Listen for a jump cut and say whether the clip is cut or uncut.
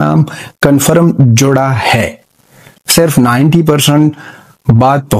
uncut